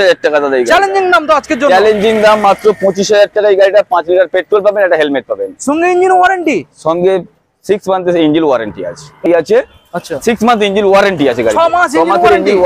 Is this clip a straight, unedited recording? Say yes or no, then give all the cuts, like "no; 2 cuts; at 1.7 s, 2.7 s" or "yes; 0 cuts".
no; 1 cut; at 9.2 s